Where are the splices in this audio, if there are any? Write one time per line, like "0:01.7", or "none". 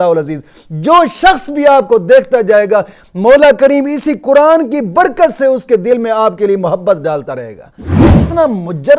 0:08.1